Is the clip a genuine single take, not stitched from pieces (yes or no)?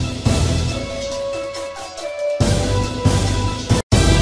no